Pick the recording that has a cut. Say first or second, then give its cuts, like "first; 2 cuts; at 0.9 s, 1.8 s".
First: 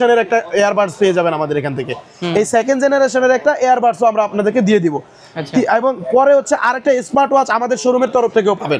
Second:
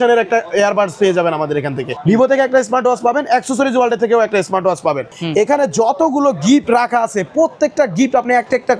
second; 2 cuts; at 1.8 s, 5.1 s